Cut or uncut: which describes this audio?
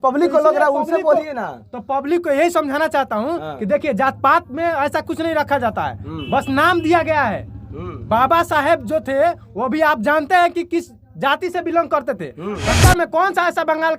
cut